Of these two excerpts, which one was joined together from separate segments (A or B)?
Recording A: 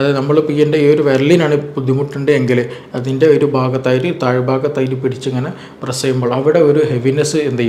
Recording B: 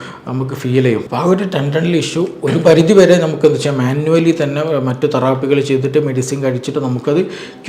B